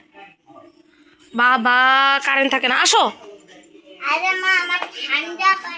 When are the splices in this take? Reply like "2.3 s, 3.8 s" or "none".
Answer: none